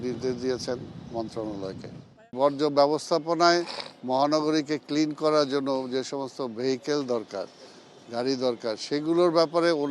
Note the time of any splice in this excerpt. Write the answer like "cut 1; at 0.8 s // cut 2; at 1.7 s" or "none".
cut 1; at 2.3 s